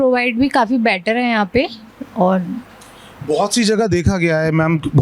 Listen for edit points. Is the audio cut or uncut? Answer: uncut